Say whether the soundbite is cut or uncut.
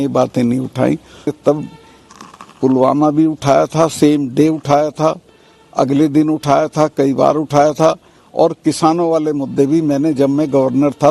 cut